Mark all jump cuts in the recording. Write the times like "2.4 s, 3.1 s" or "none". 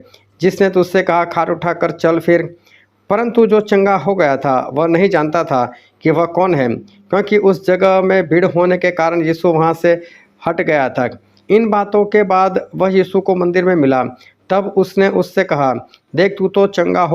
11.3 s